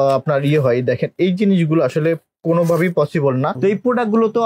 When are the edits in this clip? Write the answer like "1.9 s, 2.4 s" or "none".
3.5 s